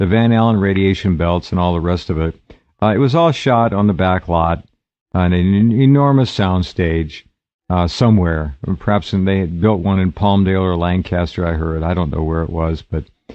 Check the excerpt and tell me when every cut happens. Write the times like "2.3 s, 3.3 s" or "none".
none

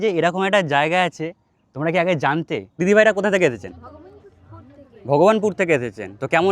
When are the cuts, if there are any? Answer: 2.8 s

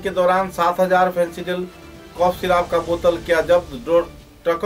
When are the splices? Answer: none

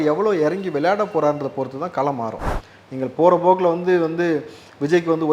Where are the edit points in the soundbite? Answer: 2.5 s

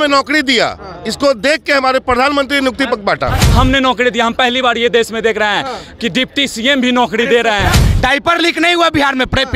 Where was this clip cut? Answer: 3.4 s, 7.8 s

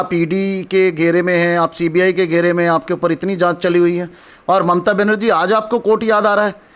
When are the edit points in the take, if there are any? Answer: none

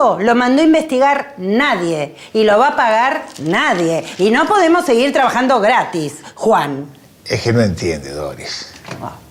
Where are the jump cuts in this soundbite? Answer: none

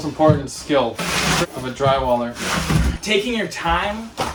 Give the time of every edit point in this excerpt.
none

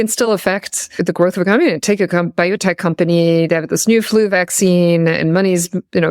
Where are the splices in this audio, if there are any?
1.0 s

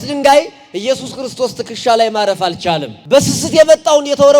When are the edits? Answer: 2.9 s

